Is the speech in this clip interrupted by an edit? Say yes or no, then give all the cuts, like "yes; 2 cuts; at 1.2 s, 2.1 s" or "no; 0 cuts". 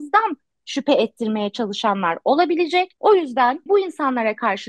yes; 2 cuts; at 2.9 s, 3.6 s